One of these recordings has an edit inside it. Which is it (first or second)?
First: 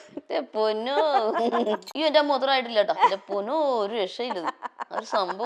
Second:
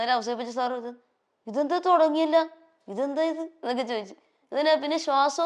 first